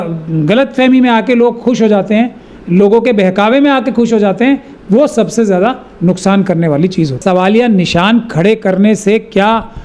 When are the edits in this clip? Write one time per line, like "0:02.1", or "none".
0:07.2